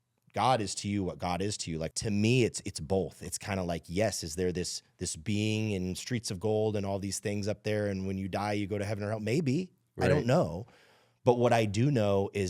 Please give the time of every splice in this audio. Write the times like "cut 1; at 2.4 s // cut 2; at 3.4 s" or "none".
cut 1; at 1.9 s